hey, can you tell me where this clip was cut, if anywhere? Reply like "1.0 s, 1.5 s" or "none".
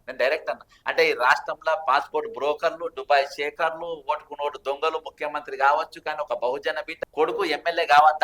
6.9 s